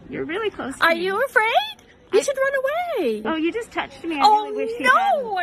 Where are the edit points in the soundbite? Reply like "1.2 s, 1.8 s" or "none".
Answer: 3.2 s